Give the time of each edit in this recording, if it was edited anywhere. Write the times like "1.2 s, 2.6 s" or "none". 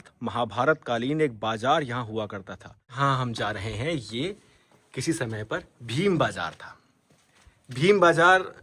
2.9 s